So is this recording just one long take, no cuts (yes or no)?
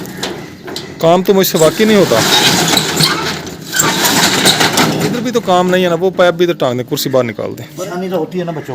no